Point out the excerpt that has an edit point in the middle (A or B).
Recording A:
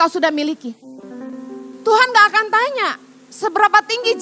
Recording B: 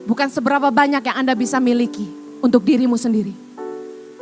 A